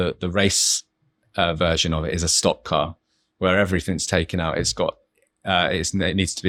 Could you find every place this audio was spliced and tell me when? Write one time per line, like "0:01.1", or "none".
none